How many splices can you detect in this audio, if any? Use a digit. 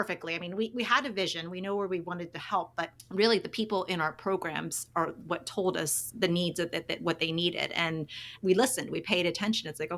2